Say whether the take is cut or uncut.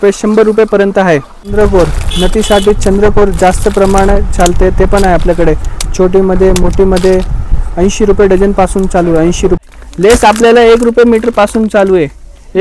cut